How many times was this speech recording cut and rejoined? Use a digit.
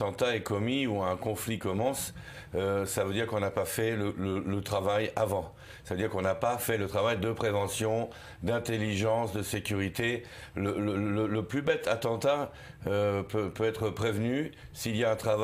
1